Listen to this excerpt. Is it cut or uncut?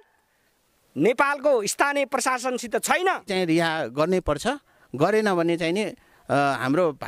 cut